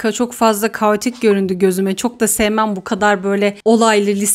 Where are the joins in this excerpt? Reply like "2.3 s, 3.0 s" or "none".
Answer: none